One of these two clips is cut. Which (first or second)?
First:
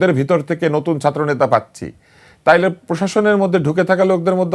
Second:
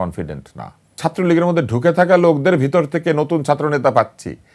second